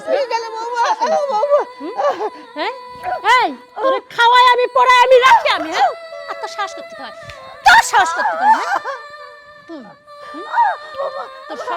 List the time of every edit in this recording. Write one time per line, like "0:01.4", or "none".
0:02.4
0:10.9